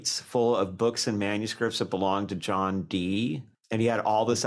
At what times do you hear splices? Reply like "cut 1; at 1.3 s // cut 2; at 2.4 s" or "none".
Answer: cut 1; at 3.5 s